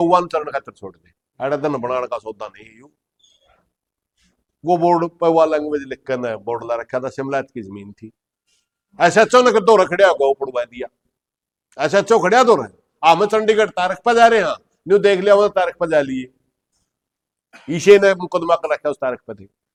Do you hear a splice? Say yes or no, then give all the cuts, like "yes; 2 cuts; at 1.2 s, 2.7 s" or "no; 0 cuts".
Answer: no; 0 cuts